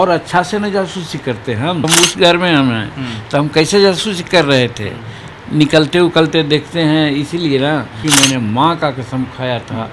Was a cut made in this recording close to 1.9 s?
yes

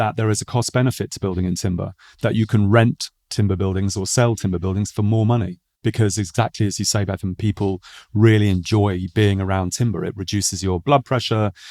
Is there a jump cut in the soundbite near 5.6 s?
yes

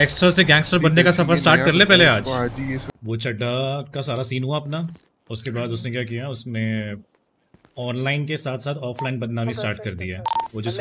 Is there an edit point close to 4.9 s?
no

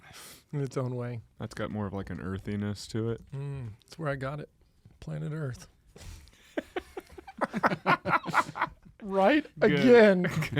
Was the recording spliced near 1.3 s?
yes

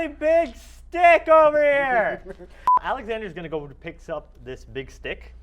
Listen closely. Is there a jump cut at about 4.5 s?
no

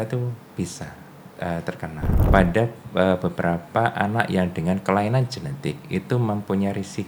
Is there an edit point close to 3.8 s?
no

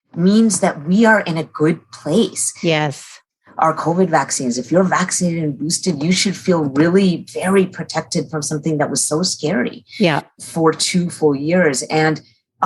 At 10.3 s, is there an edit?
yes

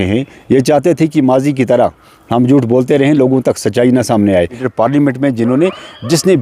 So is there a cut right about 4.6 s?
yes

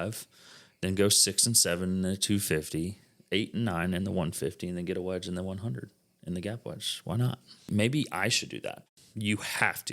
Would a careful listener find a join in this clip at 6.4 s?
no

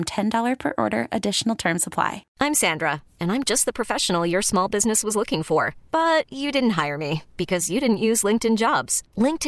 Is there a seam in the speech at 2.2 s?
yes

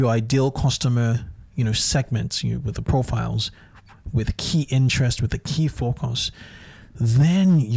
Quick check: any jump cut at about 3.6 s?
no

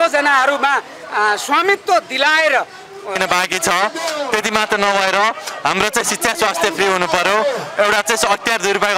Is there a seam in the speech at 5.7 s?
no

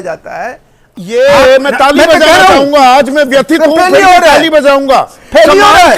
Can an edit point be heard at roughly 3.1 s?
no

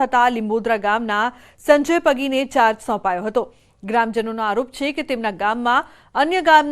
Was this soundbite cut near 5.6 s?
yes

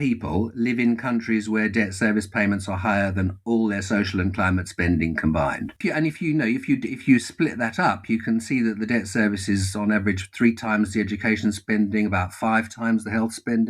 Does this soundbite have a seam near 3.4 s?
no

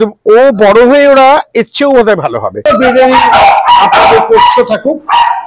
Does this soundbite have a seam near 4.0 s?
no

